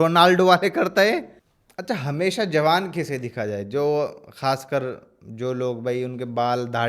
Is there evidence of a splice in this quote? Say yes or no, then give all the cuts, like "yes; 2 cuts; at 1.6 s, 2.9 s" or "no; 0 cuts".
yes; 1 cut; at 1.3 s